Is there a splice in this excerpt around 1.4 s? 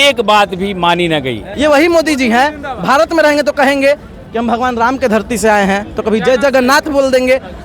yes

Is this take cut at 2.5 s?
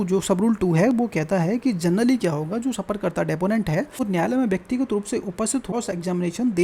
no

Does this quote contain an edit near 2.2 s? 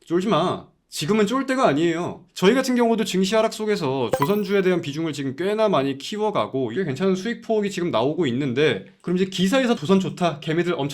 yes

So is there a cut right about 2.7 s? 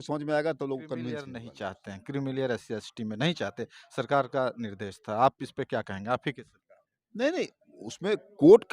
no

